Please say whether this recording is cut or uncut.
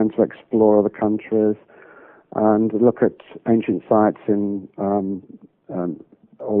uncut